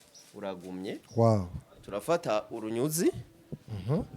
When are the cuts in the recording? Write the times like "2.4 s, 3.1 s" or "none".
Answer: 1.0 s